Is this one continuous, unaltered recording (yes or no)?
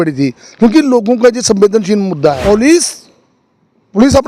no